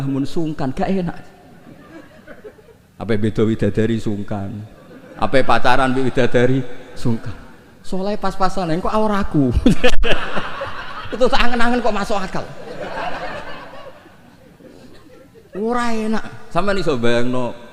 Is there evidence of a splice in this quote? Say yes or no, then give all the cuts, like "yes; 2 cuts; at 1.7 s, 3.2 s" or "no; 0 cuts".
no; 0 cuts